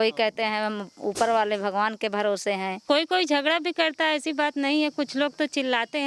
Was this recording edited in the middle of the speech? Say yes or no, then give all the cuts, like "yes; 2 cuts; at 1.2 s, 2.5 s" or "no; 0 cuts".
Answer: no; 0 cuts